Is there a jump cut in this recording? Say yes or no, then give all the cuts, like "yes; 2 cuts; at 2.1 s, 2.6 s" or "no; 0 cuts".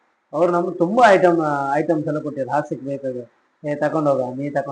no; 0 cuts